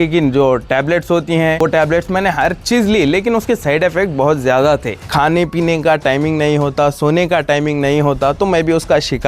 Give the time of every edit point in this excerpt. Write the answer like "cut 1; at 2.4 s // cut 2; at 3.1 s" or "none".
cut 1; at 1.6 s // cut 2; at 5.0 s

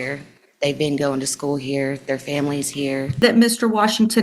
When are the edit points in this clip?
cut 1; at 3.2 s

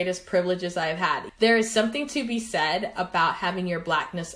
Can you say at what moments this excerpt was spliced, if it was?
cut 1; at 1.3 s

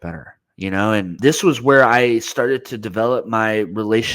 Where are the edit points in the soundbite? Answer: cut 1; at 1.1 s

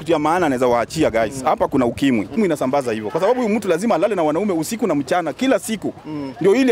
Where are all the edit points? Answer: cut 1; at 2.4 s

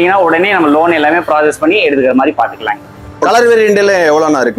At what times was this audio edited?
cut 1; at 3.2 s

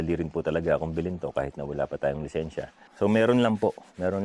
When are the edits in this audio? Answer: cut 1; at 2.8 s

